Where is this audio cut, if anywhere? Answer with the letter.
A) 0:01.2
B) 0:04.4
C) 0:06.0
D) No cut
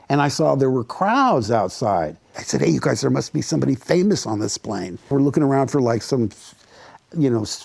D